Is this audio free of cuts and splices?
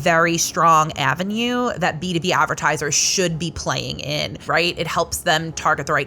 no; 1 cut; at 4.4 s

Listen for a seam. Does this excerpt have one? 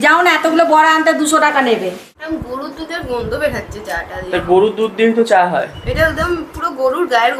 yes; 1 cut; at 2.0 s

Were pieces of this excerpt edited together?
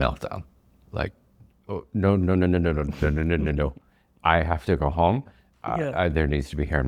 no; 0 cuts

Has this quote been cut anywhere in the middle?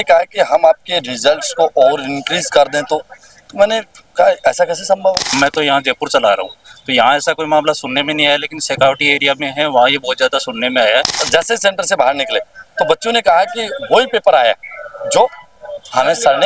yes; 2 cuts; at 5.4 s, 11.2 s

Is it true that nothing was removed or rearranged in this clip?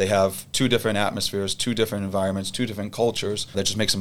yes; 0 cuts

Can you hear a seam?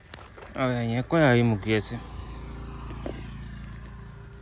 no; 0 cuts

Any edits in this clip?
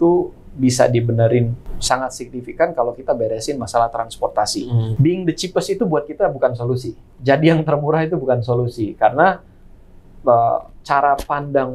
yes; 2 cuts; at 1.7 s, 4.9 s

